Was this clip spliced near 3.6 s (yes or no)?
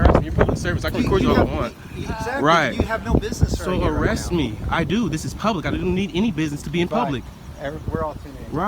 yes